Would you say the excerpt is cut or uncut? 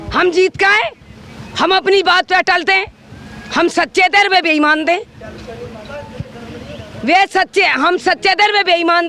uncut